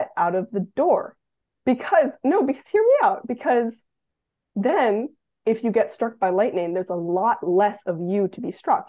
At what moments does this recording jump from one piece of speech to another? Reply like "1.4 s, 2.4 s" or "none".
none